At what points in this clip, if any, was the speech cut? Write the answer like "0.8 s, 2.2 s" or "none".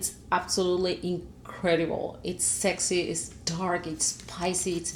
none